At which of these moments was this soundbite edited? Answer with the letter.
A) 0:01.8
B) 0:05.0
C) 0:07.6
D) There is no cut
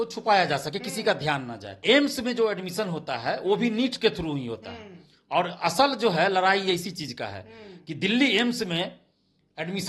A